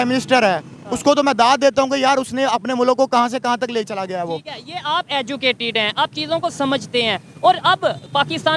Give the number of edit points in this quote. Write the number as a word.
zero